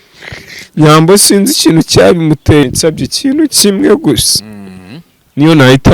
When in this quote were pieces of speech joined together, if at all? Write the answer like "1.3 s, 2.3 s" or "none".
2.6 s